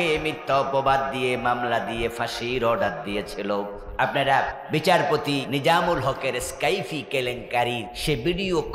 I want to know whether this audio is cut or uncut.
cut